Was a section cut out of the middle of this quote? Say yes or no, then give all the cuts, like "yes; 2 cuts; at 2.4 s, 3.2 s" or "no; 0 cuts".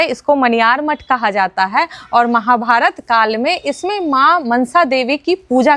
no; 0 cuts